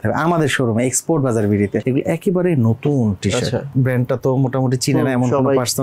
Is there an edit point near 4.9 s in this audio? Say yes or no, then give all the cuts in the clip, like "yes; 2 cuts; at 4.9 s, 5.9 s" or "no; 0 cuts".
no; 2 cuts; at 1.8 s, 3.7 s